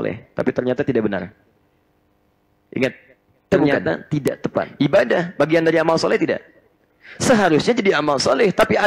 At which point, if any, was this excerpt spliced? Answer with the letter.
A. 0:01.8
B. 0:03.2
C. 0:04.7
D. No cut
C